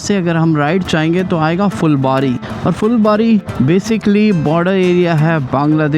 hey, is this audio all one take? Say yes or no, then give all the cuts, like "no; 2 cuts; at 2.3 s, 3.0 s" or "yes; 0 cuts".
no; 2 cuts; at 2.5 s, 3.5 s